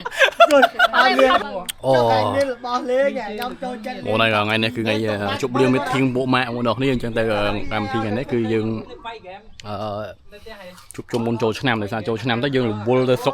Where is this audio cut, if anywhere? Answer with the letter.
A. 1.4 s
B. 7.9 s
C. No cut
A